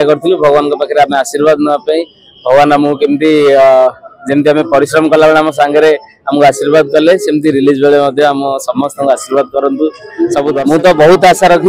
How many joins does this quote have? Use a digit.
1